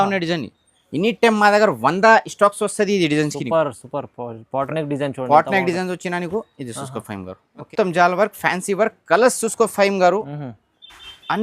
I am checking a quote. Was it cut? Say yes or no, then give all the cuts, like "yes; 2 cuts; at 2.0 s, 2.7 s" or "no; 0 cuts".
yes; 1 cut; at 7.7 s